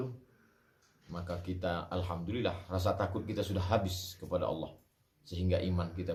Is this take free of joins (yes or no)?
yes